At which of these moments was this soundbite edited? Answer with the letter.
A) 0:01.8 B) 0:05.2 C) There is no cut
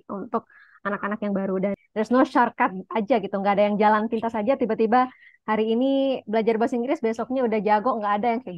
A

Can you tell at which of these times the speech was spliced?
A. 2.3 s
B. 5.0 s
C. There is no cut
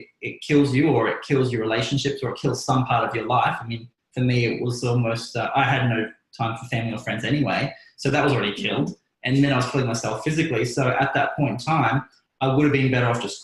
C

